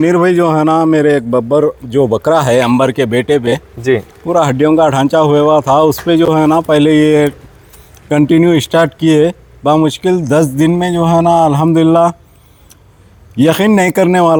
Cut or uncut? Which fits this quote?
uncut